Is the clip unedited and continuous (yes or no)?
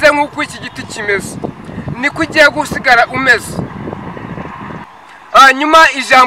no